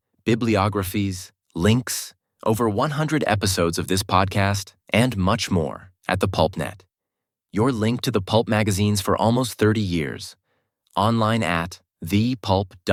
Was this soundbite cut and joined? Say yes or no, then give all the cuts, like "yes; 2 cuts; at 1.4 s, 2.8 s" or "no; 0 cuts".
no; 0 cuts